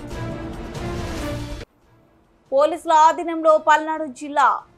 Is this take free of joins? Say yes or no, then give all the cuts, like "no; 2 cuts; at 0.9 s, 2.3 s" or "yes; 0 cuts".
yes; 0 cuts